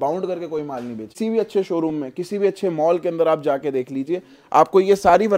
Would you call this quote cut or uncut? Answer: cut